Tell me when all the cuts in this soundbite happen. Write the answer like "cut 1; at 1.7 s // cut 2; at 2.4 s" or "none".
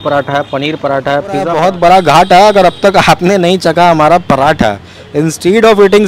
cut 1; at 1.5 s